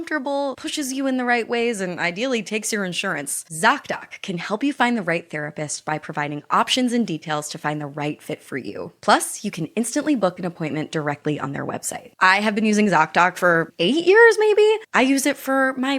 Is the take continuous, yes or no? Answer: no